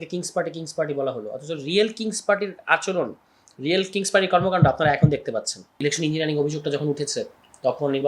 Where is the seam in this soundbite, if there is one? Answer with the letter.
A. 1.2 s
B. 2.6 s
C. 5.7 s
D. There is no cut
C